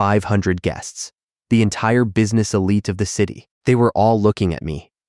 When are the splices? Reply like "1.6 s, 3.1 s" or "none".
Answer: 3.5 s